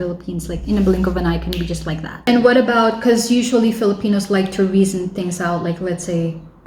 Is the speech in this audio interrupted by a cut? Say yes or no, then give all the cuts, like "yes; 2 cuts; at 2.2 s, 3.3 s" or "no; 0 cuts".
yes; 1 cut; at 2.2 s